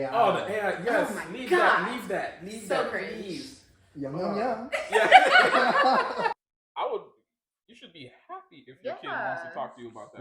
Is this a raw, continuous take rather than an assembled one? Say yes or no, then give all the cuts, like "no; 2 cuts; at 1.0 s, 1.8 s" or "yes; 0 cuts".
no; 1 cut; at 6.4 s